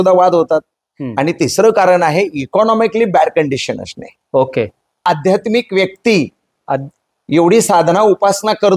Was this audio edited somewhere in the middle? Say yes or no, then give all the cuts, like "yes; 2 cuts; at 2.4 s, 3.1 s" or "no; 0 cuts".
yes; 1 cut; at 5.0 s